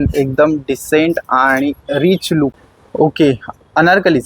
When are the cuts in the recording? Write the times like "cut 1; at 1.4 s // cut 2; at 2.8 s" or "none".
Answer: cut 1; at 2.6 s